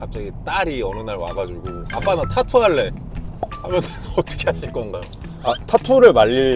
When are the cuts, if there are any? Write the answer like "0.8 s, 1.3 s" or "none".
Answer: none